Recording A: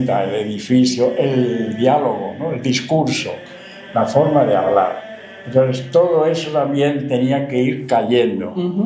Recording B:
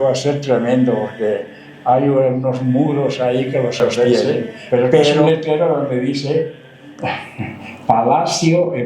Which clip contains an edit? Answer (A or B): B